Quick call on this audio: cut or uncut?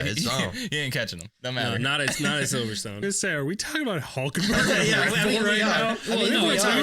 cut